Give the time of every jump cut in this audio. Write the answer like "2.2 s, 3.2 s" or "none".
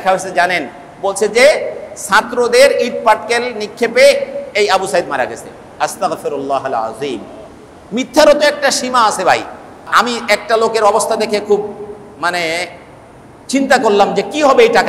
9.9 s